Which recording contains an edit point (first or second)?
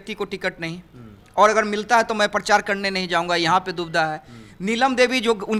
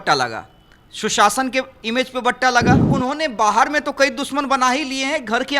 second